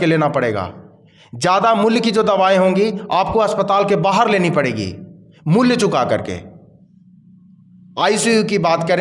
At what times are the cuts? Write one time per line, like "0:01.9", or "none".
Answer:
none